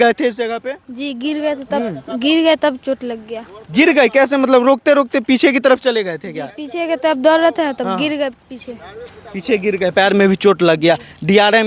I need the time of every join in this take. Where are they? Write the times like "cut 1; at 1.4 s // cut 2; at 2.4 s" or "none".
none